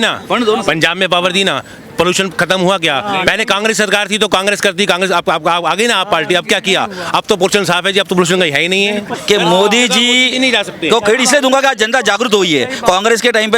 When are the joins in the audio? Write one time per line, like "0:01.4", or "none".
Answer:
0:09.1